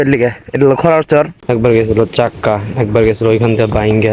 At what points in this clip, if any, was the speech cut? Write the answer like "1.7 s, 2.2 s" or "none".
1.4 s